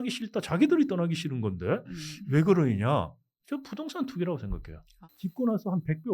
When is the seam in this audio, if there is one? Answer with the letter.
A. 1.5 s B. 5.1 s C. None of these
B